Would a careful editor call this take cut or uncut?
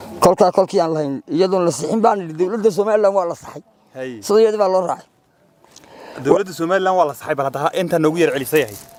uncut